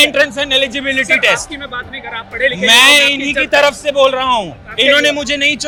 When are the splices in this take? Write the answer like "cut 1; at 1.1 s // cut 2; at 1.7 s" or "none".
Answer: none